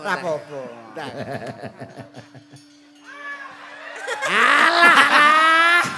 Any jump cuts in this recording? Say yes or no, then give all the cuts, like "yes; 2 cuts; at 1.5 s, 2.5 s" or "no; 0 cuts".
no; 0 cuts